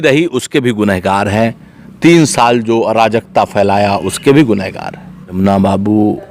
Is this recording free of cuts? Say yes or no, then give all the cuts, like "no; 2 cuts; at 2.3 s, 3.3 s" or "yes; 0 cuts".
no; 1 cut; at 5.4 s